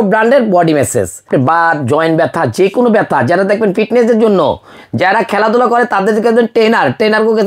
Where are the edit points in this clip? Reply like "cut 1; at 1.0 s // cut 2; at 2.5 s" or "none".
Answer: cut 1; at 1.2 s